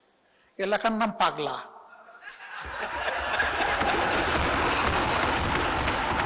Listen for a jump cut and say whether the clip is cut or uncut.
uncut